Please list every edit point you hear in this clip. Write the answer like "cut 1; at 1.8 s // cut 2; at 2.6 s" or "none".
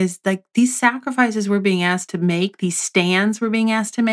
cut 1; at 2.0 s